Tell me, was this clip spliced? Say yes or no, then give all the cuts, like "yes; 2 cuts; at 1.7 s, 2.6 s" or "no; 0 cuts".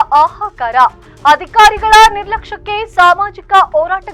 no; 0 cuts